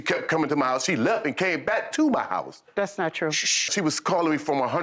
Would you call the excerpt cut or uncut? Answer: cut